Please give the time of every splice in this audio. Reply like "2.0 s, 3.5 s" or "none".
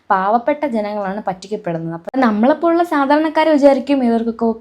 2.1 s